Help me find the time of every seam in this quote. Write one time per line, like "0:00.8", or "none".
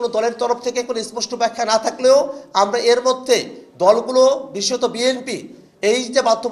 none